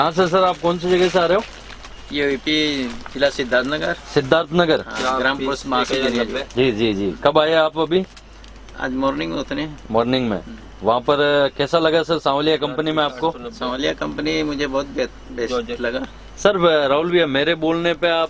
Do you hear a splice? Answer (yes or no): no